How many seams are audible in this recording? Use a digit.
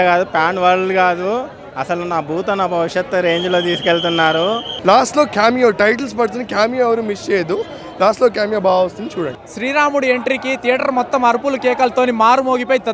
2